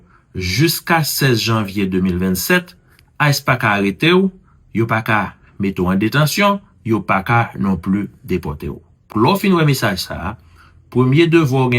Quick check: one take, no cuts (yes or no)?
no